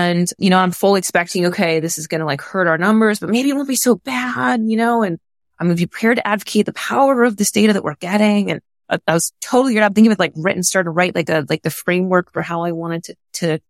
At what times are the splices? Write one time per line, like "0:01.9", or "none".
none